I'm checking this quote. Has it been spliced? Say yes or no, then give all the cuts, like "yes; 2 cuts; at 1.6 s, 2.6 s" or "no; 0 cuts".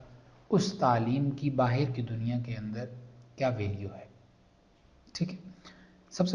no; 0 cuts